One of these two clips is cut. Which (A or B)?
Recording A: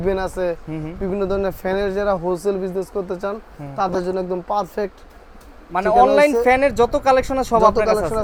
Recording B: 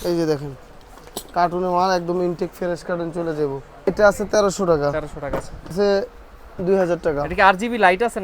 B